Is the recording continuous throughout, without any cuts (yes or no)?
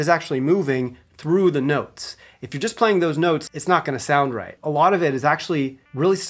no